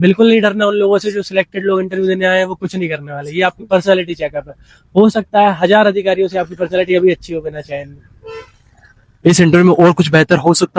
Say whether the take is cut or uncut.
uncut